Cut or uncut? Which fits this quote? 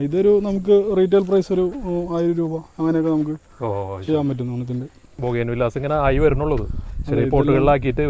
cut